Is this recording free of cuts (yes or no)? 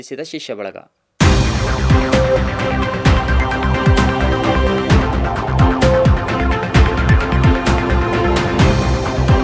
yes